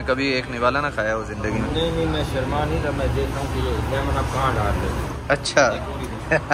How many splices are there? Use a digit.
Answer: 0